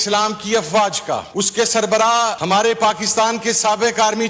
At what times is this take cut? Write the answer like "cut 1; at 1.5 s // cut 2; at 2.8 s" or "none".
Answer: cut 1; at 1.3 s // cut 2; at 2.4 s